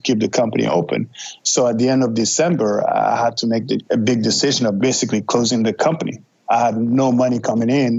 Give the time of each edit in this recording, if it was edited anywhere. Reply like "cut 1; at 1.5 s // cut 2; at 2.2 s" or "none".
cut 1; at 4.8 s